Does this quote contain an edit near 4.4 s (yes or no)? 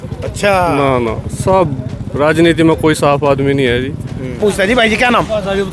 yes